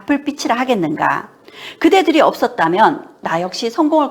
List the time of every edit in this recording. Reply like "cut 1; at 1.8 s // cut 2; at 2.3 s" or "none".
cut 1; at 3.2 s